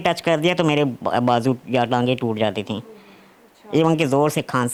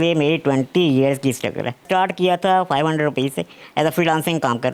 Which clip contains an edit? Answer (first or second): second